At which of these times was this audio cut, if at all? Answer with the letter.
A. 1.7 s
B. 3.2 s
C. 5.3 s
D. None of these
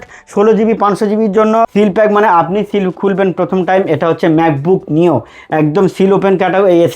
A